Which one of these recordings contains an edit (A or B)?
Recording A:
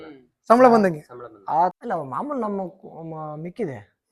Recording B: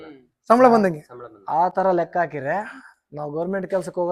A